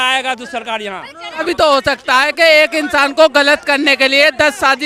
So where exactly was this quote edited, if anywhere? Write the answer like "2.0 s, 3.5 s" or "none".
1.4 s